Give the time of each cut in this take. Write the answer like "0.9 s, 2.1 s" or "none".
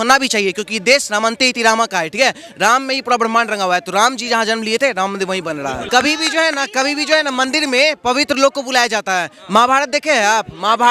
5.8 s